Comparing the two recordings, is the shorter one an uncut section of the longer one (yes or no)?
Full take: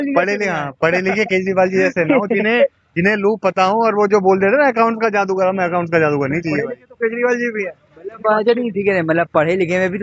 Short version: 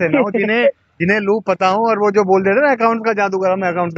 yes